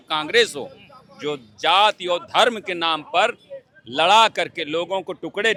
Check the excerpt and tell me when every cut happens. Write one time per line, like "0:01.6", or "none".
none